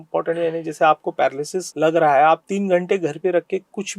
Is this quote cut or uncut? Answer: cut